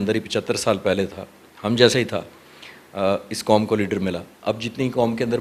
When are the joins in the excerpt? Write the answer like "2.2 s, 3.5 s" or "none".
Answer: none